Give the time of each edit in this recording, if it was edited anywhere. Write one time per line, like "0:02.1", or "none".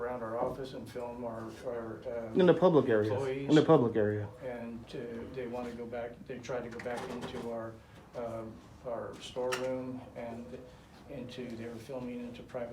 none